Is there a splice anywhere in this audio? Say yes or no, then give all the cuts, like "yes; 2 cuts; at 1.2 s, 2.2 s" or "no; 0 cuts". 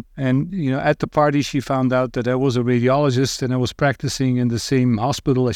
no; 0 cuts